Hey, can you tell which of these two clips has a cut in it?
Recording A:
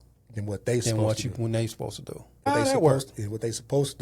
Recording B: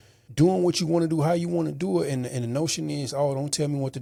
A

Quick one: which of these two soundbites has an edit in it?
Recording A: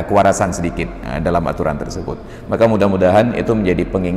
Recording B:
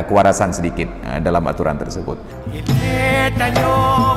B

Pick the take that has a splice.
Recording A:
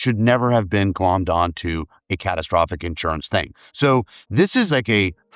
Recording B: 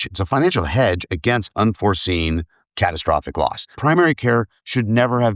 B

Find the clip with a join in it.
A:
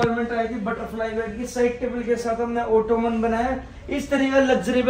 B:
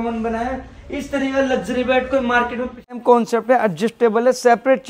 B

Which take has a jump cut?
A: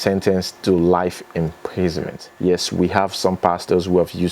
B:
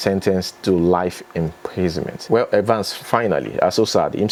A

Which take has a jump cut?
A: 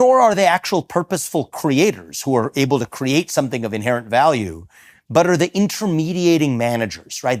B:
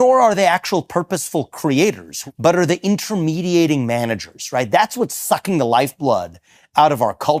B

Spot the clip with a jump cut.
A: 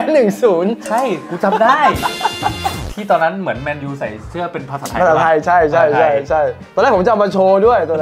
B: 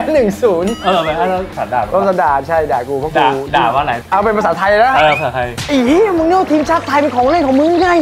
B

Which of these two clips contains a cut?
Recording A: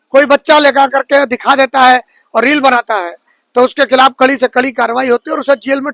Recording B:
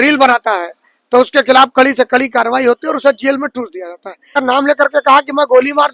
B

